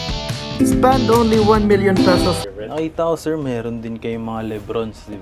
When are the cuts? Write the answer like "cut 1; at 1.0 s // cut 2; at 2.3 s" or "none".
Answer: cut 1; at 2.4 s